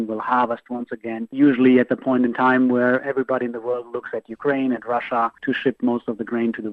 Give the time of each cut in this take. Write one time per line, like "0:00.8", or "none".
0:01.3
0:05.4